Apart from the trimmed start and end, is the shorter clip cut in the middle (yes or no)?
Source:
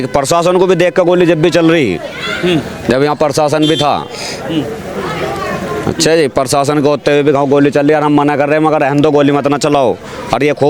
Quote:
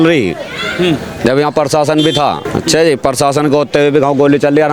yes